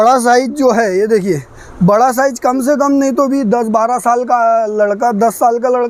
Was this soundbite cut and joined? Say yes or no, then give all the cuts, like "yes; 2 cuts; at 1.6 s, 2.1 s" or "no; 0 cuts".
no; 0 cuts